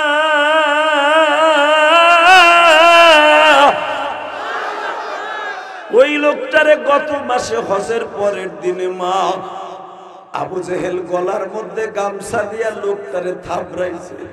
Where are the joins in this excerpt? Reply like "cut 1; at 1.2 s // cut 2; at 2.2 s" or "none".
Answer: none